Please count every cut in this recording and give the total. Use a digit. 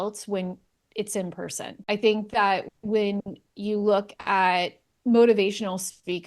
1